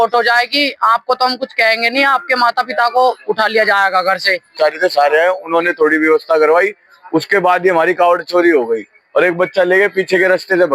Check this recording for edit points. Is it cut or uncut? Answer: cut